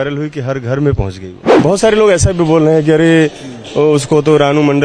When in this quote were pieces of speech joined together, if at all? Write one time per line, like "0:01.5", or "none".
0:01.6

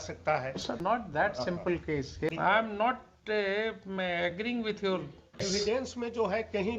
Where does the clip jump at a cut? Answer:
0:00.8
0:02.3
0:05.4

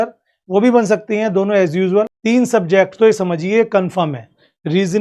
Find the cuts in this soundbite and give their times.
0:02.2

